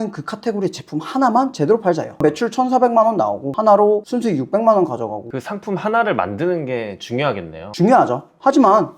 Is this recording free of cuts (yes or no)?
no